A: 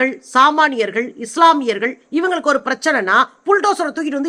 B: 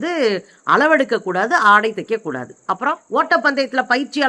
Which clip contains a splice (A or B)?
B